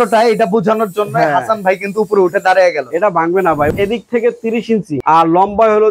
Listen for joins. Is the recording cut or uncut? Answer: cut